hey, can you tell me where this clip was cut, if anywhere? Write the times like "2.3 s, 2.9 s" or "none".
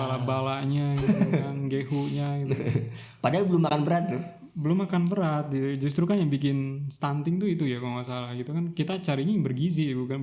none